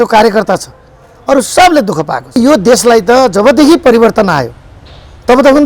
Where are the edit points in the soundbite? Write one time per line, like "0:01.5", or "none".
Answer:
0:02.4